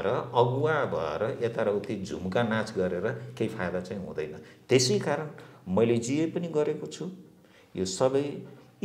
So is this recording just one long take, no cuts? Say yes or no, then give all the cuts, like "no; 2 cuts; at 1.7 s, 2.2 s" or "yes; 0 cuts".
yes; 0 cuts